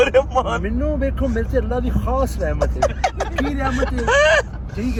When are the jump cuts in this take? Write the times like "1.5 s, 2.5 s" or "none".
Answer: none